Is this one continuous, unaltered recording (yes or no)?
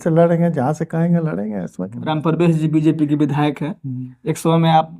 no